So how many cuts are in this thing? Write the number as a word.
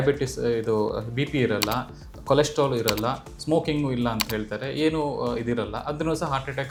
zero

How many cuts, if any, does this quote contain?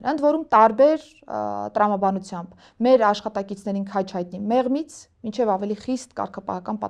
zero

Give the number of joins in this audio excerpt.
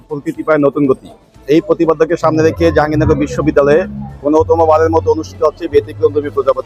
zero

